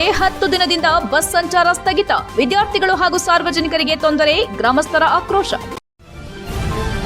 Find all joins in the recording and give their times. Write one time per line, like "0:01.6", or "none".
0:05.8